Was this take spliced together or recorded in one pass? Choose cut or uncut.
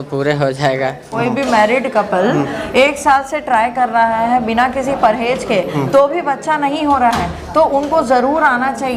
cut